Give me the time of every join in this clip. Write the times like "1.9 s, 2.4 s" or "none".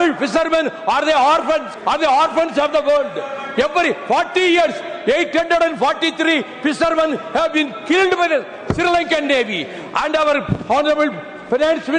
1.7 s

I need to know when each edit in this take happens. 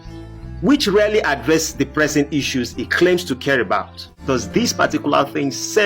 4.1 s

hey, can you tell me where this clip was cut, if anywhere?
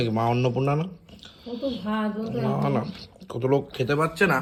none

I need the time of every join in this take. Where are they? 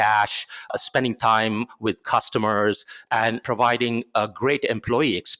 0.7 s, 3.4 s

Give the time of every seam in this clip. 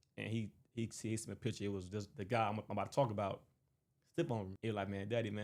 4.5 s

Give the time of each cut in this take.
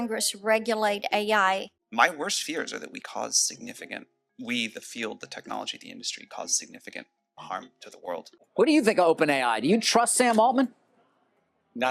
1.8 s, 8.4 s

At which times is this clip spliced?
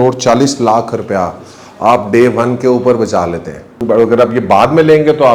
3.8 s

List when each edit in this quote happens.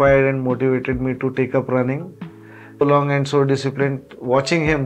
2.8 s

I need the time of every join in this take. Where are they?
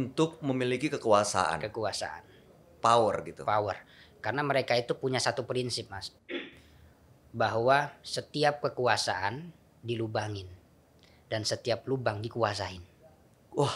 none

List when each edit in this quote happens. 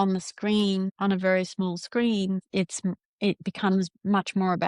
0.9 s, 2.5 s

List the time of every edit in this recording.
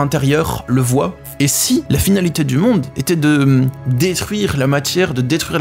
1.1 s

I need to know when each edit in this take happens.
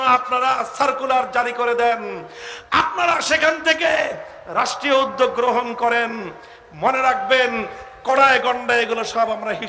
none

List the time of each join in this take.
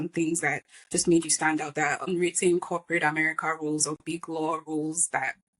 2.1 s

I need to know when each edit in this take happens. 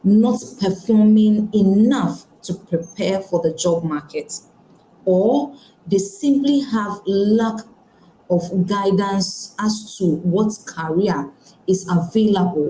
none

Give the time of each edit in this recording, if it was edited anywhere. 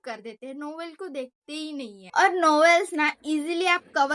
2.0 s

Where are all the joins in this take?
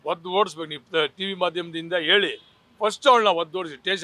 none

